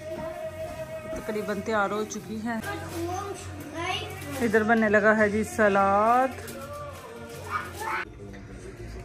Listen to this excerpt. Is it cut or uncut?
uncut